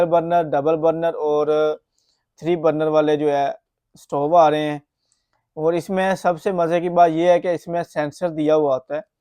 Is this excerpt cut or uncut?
uncut